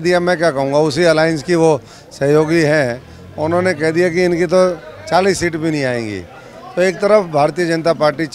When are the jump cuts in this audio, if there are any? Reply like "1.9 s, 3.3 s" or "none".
none